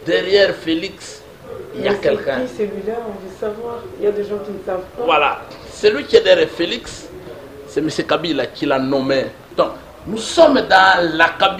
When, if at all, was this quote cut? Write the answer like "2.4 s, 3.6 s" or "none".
9.4 s